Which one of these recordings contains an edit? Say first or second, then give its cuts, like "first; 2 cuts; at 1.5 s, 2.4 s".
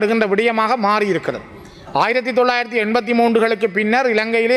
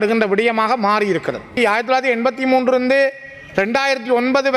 second; 1 cut; at 1.5 s